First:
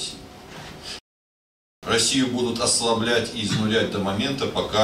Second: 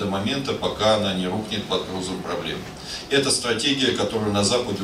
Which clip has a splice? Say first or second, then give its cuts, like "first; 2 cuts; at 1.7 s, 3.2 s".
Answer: first; 1 cut; at 1.1 s